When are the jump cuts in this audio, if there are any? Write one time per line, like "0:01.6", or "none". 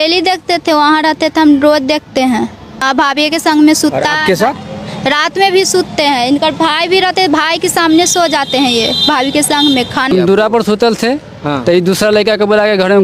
0:02.7
0:10.1